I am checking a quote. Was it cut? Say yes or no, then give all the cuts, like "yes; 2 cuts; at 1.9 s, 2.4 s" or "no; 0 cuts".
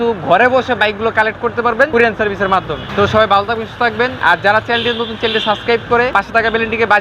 yes; 4 cuts; at 1.9 s, 2.8 s, 4.1 s, 6.1 s